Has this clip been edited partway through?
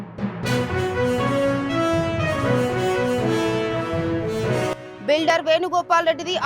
yes; 1 cut; at 4.9 s

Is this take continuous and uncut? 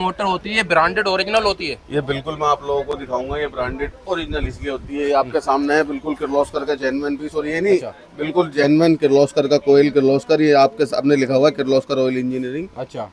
yes; 0 cuts

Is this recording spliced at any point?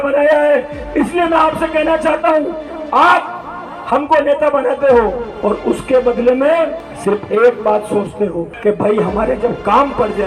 yes; 3 cuts; at 5.3 s, 6.9 s, 8.5 s

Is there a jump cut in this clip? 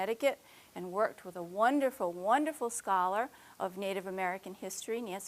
yes; 1 cut; at 3.3 s

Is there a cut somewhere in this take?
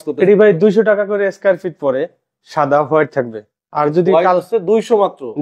no; 0 cuts

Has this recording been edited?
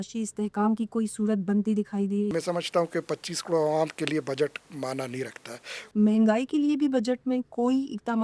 yes; 2 cuts; at 2.3 s, 5.9 s

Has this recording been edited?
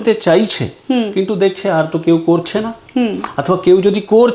no; 0 cuts

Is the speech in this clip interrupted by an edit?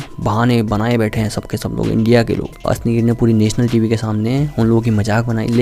yes; 1 cut; at 2.6 s

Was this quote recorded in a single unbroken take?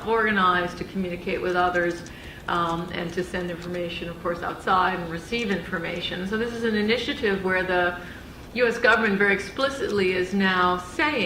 no; 1 cut; at 6.1 s

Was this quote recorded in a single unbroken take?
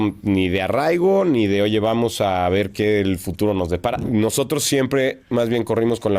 no; 1 cut; at 4.0 s

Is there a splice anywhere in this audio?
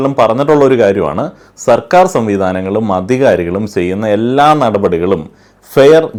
no; 0 cuts

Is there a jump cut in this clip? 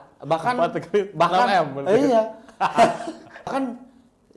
no; 0 cuts

